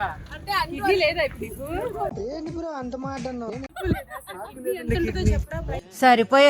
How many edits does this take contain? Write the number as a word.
one